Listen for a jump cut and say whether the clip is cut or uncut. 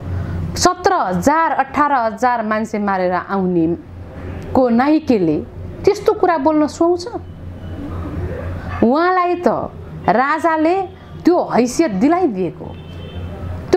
uncut